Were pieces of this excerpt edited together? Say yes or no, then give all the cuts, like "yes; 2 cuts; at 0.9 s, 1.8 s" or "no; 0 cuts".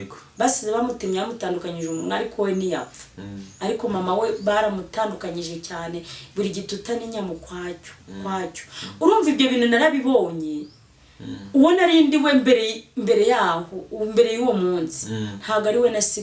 no; 0 cuts